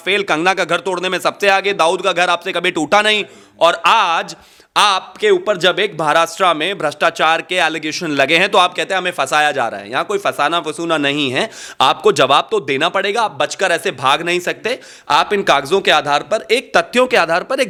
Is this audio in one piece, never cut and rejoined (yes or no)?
yes